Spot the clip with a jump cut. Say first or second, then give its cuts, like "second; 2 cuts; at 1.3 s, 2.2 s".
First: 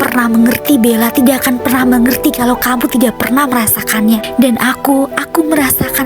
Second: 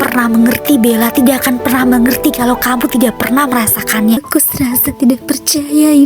second; 1 cut; at 4.2 s